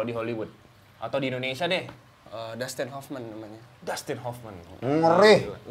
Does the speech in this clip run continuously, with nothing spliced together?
yes; 0 cuts

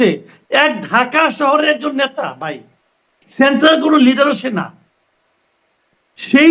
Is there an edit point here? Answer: no; 0 cuts

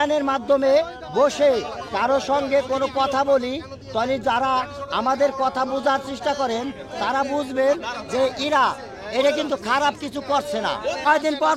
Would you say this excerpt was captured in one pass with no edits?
yes; 0 cuts

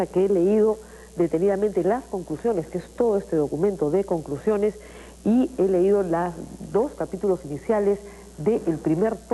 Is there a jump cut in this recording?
yes; 1 cut; at 5.5 s

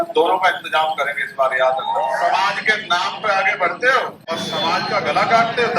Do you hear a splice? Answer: yes; 2 cuts; at 2.1 s, 4.2 s

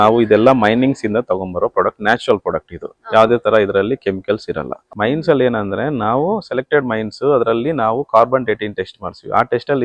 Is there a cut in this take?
no; 0 cuts

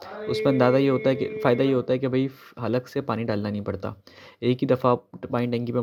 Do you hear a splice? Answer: no; 0 cuts

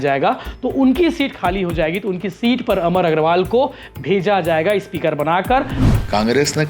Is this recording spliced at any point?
yes; 1 cut; at 5.8 s

